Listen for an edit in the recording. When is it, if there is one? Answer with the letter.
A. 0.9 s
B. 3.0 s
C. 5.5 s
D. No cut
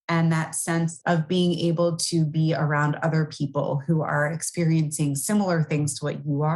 A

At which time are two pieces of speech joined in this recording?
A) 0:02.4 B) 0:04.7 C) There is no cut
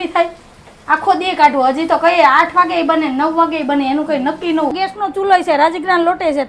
B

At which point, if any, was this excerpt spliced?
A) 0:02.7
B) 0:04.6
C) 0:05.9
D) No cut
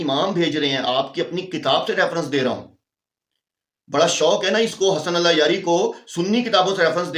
D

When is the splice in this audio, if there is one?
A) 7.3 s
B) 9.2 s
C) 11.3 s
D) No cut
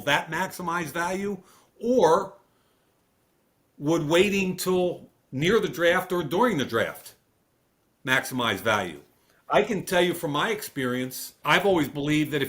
C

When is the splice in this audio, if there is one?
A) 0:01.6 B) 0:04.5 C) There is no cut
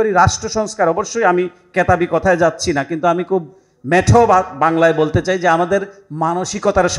C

